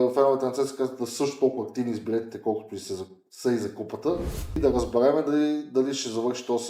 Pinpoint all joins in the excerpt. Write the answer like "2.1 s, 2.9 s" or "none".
4.6 s